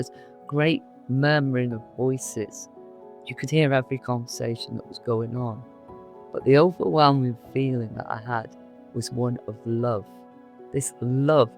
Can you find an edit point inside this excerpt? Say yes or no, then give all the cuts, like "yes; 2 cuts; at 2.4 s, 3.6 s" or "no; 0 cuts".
yes; 2 cuts; at 3.1 s, 6.1 s